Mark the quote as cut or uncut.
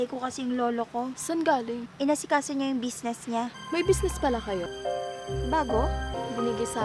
cut